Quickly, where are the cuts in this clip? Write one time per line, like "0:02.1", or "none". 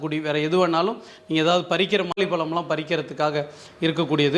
0:02.2